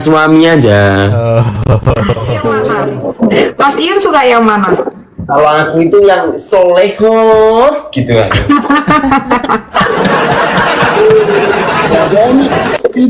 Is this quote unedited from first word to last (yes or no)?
no